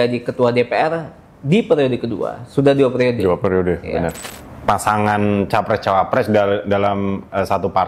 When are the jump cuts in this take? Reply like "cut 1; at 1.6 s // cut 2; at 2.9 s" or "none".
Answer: cut 1; at 4.2 s